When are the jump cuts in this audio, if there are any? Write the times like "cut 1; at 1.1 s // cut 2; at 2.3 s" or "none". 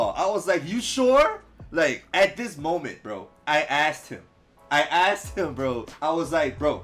cut 1; at 2.0 s